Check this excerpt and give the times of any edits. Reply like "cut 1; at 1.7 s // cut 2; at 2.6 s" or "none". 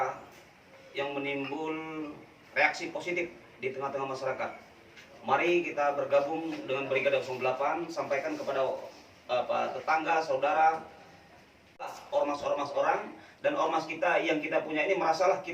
cut 1; at 11.9 s